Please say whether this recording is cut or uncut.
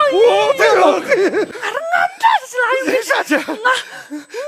cut